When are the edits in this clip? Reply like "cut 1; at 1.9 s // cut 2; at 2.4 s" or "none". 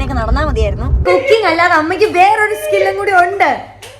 cut 1; at 1.0 s